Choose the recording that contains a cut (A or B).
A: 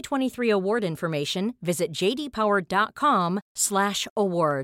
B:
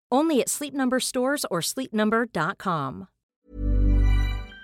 B